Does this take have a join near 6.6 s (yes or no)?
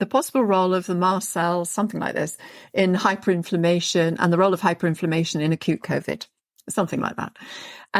no